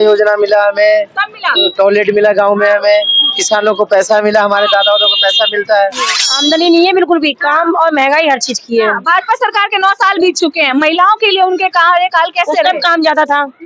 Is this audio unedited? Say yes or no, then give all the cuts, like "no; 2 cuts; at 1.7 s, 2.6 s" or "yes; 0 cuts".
no; 1 cut; at 6.3 s